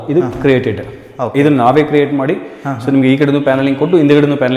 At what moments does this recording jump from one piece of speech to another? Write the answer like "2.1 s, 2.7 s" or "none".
none